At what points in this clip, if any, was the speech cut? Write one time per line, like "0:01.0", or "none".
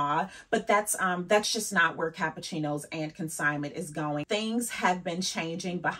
none